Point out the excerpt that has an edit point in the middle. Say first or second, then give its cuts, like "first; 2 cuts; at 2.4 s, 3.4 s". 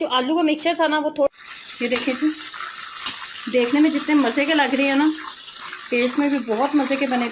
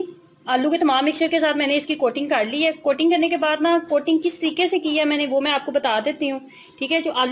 first; 1 cut; at 1.3 s